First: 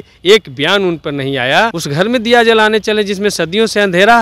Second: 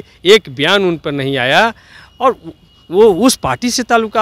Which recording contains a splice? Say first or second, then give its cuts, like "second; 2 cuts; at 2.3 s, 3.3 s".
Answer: first; 1 cut; at 1.8 s